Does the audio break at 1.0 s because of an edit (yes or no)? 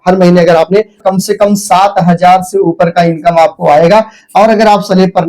yes